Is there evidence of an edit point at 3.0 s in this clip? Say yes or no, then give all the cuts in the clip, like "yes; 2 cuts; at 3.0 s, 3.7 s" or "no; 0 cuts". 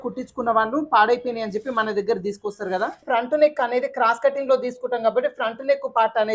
yes; 1 cut; at 3.0 s